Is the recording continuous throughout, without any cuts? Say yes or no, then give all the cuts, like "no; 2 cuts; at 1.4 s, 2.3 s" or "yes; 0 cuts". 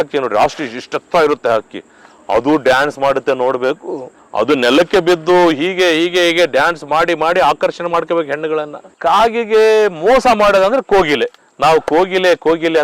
no; 2 cuts; at 4.1 s, 8.8 s